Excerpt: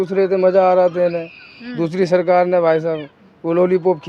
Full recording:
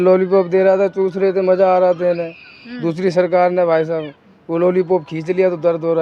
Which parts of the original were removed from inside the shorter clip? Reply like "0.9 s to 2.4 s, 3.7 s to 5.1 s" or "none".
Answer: none